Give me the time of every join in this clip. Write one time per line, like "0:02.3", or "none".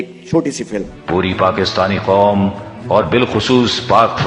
0:00.9